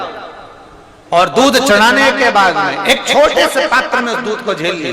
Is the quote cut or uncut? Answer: uncut